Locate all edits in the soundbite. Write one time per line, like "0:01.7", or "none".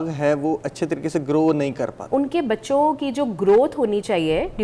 0:02.0